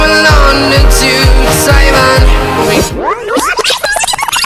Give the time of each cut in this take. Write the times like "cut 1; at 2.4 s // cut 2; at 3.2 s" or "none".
cut 1; at 2.7 s